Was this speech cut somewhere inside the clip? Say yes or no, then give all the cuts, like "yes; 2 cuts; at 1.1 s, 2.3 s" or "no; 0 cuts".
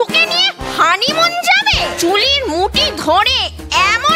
yes; 1 cut; at 1.9 s